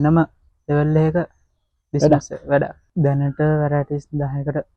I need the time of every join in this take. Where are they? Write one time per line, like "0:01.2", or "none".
0:02.8